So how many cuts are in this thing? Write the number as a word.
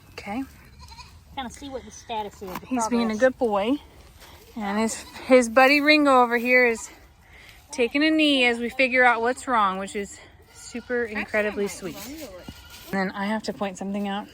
one